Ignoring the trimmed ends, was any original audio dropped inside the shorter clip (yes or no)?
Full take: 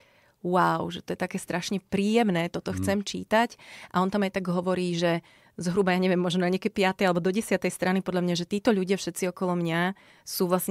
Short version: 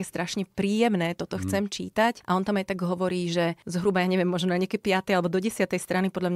yes